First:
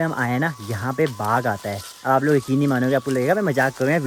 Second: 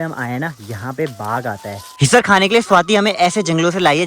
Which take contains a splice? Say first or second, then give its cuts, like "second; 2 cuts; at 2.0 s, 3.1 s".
second; 1 cut; at 1.9 s